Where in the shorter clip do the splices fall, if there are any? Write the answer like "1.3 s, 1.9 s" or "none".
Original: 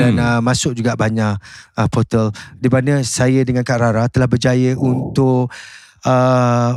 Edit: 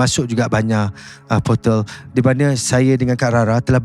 none